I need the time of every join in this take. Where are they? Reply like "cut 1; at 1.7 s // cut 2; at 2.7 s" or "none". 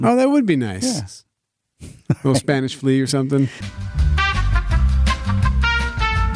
cut 1; at 3.6 s